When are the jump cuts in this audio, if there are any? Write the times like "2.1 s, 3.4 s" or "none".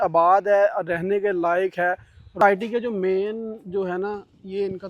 2.4 s